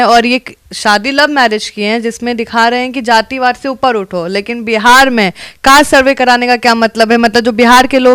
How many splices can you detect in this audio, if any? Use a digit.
0